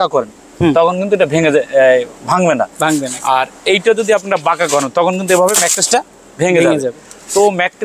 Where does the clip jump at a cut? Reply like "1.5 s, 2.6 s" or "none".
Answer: none